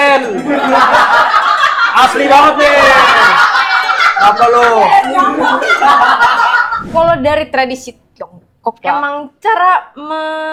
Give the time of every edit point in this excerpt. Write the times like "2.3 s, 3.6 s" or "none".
none